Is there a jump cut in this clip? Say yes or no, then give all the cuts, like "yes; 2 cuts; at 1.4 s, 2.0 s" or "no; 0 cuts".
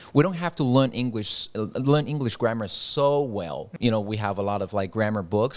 yes; 1 cut; at 3.7 s